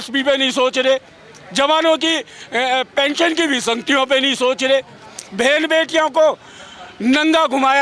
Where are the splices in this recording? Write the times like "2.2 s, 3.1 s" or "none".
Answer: none